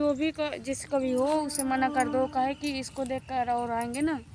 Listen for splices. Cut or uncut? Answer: uncut